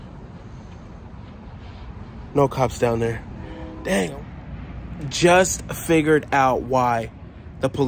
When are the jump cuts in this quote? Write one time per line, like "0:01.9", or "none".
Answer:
0:04.1